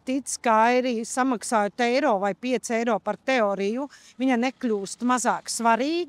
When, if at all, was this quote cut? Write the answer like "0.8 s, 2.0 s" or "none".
none